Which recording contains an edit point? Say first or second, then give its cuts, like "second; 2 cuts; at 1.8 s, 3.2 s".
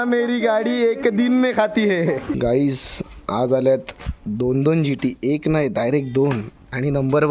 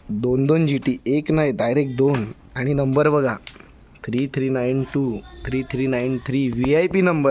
first; 1 cut; at 2.3 s